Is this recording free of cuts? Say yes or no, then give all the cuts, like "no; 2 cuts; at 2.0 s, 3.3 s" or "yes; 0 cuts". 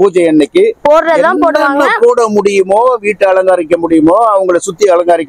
yes; 0 cuts